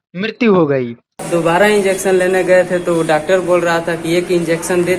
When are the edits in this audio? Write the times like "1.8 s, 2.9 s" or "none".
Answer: 1.1 s